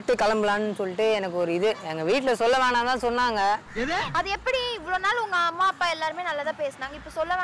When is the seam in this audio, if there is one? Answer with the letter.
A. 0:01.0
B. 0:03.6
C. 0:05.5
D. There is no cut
D